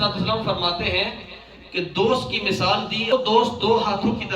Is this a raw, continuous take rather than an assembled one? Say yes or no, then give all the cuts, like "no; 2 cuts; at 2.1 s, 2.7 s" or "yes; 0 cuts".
no; 1 cut; at 3.1 s